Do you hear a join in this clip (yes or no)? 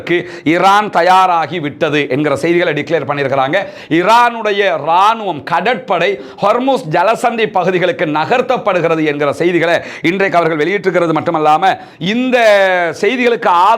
no